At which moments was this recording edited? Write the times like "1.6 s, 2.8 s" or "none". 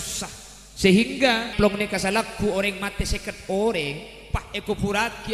1.5 s